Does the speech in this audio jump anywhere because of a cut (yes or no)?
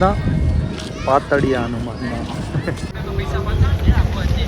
yes